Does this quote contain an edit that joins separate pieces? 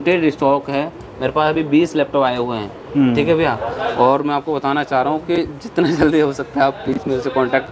no; 0 cuts

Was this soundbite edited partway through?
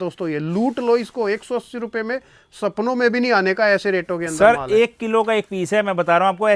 no; 0 cuts

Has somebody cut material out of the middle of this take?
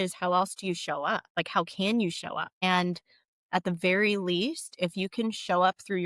yes; 2 cuts; at 1.3 s, 2.5 s

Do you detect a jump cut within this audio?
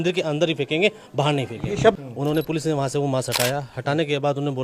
yes; 1 cut; at 1.9 s

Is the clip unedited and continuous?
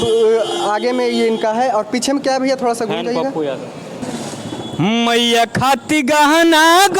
no; 1 cut; at 4.0 s

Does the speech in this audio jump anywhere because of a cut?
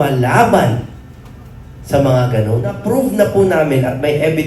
yes; 1 cut; at 2.8 s

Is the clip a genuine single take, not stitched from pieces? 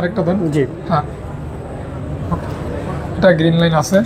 yes; 0 cuts

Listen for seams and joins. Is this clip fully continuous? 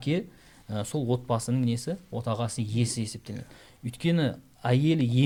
yes; 0 cuts

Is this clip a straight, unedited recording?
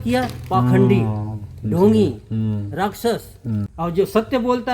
no; 1 cut; at 3.7 s

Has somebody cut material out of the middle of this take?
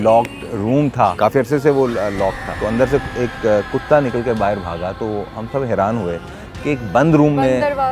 yes; 2 cuts; at 1.1 s, 2.5 s

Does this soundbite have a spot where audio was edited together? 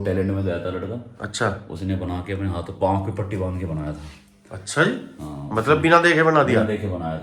no; 0 cuts

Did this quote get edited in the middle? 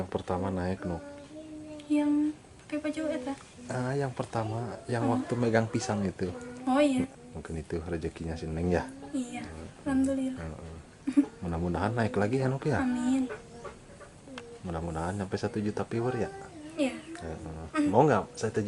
yes; 1 cut; at 7.1 s

